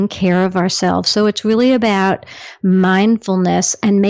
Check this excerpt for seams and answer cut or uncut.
uncut